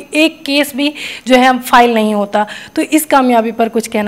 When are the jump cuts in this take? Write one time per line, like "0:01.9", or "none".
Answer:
none